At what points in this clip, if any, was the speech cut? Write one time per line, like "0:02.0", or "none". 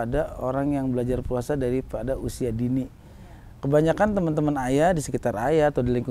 none